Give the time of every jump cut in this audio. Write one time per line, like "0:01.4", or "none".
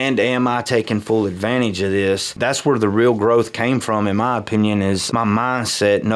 0:02.3
0:05.0